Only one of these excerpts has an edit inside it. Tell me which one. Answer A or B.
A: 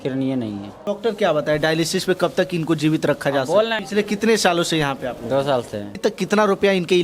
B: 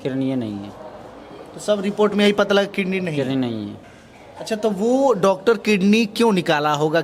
A